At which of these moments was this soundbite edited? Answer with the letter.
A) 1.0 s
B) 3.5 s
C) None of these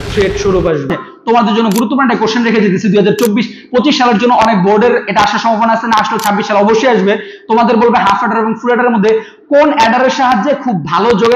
A